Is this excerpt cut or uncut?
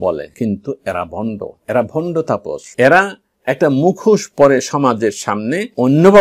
uncut